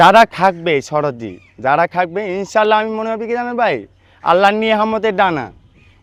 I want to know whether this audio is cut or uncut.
uncut